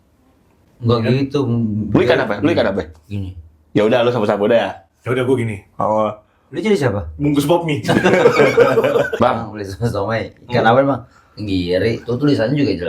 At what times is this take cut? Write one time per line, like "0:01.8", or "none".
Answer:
0:09.1